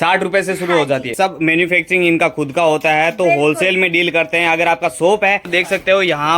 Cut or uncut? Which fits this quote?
cut